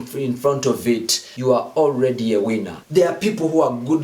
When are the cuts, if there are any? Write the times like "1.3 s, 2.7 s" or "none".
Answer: 2.7 s